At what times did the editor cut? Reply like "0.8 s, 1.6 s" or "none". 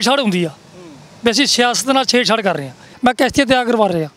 2.9 s